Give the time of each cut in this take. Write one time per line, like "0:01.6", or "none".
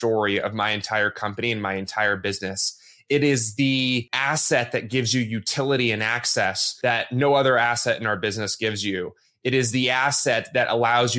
0:04.1
0:06.7